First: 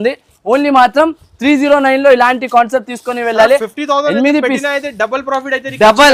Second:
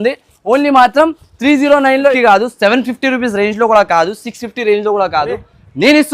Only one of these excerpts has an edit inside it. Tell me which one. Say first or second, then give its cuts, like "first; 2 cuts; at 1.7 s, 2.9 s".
second; 1 cut; at 2.1 s